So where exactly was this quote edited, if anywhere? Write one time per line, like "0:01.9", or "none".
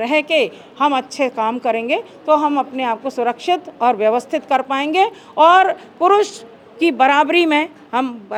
none